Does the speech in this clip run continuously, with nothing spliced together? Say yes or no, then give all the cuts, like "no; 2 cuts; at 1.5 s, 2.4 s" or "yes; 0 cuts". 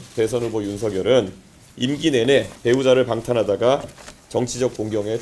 no; 1 cut; at 2.5 s